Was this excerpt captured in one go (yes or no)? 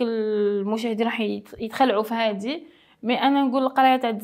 yes